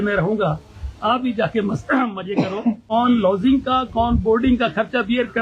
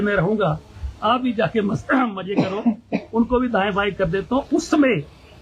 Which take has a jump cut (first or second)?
first